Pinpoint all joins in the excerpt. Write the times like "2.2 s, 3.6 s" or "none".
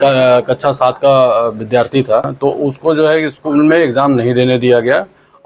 2.3 s